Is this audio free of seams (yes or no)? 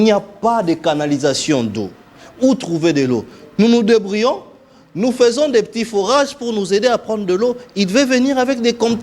yes